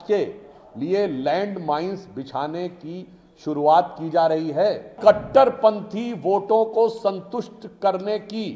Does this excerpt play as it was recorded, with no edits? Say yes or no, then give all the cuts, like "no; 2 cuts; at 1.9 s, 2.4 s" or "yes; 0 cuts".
no; 1 cut; at 4.9 s